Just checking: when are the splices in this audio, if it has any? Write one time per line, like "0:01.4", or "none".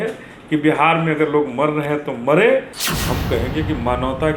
0:02.8

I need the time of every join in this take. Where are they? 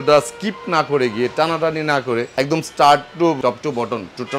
0:02.3
0:03.4

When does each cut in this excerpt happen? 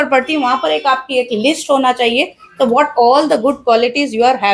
none

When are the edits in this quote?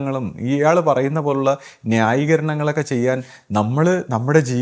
none

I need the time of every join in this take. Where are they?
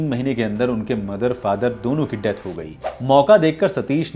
0:02.7

